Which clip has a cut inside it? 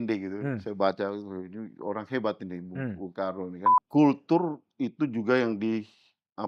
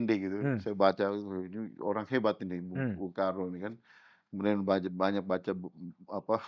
first; 1 cut; at 3.7 s

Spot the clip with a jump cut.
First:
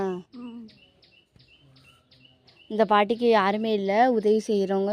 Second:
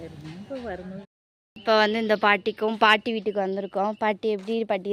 second; 1 cut; at 1.0 s

